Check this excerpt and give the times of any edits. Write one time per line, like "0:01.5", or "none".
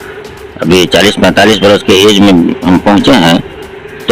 none